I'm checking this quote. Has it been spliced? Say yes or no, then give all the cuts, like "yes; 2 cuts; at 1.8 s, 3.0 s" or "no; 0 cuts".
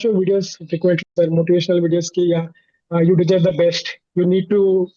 no; 0 cuts